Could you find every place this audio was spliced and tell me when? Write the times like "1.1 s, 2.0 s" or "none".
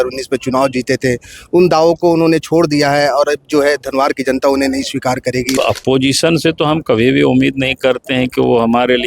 5.6 s